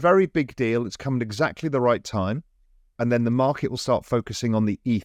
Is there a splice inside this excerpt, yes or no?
no